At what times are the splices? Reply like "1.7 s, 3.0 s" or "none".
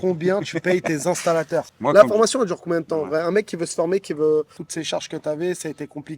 1.7 s, 4.6 s